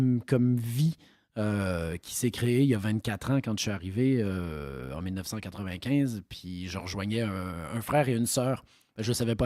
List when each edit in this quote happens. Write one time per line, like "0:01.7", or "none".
none